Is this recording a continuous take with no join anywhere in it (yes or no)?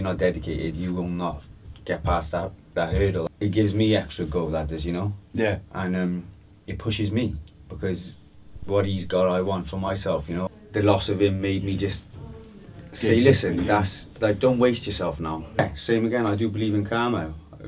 no